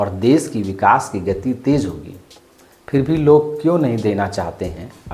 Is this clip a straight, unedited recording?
yes; 0 cuts

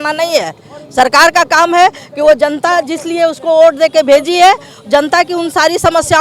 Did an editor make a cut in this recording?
no; 0 cuts

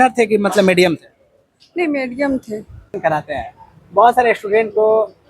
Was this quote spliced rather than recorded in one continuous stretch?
yes; 1 cut; at 2.9 s

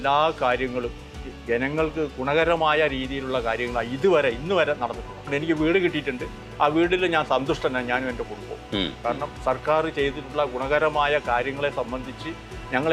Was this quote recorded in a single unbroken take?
yes; 0 cuts

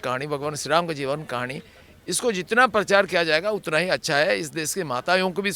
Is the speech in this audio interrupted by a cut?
no; 0 cuts

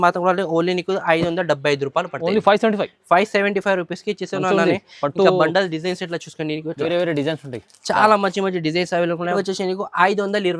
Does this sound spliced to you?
yes; 1 cut; at 9.3 s

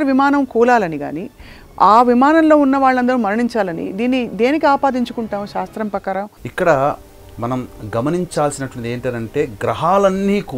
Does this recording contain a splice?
yes; 1 cut; at 6.4 s

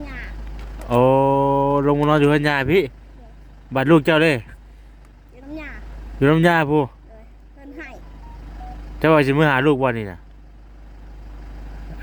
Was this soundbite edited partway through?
no; 0 cuts

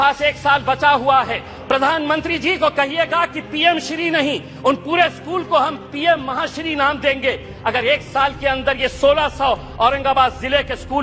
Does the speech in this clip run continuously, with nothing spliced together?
no; 1 cut; at 1.5 s

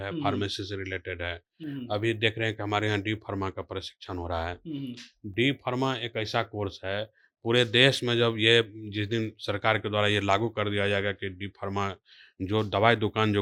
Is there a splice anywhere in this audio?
no; 0 cuts

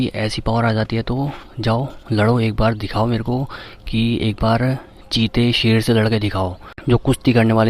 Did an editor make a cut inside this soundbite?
yes; 1 cut; at 6.7 s

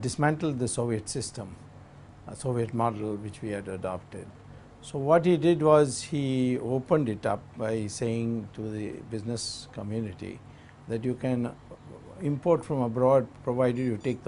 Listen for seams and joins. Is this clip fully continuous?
no; 1 cut; at 10.1 s

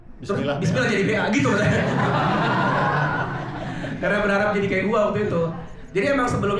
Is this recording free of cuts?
yes; 0 cuts

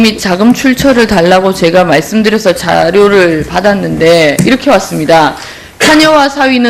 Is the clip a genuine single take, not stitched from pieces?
no; 1 cut; at 2.4 s

